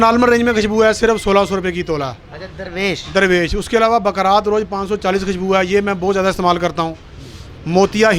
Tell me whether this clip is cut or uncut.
uncut